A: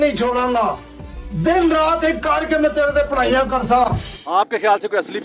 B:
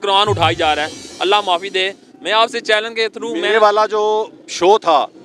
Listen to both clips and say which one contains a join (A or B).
A